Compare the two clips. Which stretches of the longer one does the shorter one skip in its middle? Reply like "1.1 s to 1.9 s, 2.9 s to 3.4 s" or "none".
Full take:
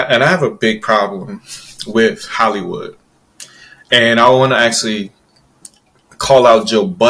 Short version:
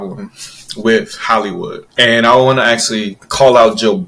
2.9 s to 3.7 s, 5.1 s to 6.1 s